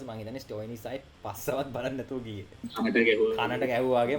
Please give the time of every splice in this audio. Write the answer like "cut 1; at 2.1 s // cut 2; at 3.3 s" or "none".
cut 1; at 2.7 s